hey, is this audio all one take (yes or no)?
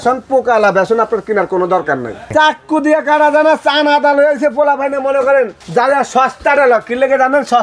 no